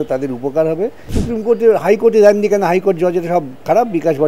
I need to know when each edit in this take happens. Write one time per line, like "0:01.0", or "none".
0:01.2